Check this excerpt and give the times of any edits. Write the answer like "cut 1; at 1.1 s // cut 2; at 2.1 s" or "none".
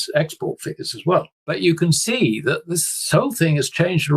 cut 1; at 1.4 s